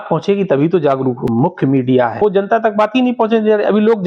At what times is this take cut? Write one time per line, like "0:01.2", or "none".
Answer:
0:01.2
0:02.2